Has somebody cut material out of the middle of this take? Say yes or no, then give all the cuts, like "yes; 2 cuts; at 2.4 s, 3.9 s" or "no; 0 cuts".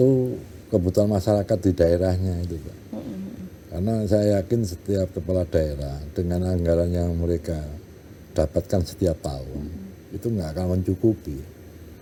no; 0 cuts